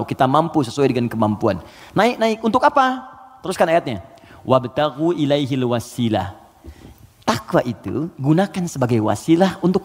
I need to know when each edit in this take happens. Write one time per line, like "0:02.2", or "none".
none

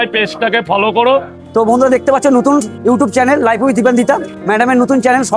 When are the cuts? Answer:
0:01.3
0:02.7
0:04.3

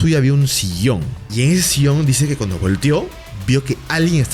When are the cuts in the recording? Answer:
0:01.2

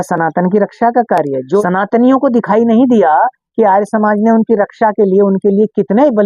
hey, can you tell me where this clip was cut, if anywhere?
0:01.6

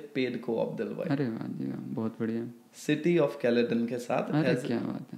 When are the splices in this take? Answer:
none

